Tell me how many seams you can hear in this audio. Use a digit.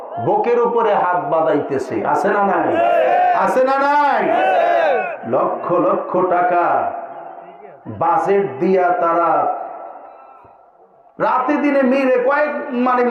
0